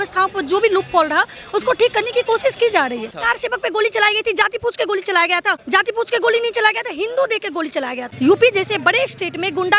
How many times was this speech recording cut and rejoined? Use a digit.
3